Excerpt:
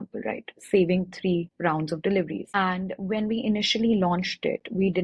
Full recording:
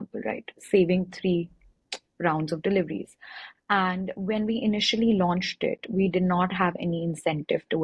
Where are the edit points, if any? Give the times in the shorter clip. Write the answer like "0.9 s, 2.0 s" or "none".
1.5 s, 2.5 s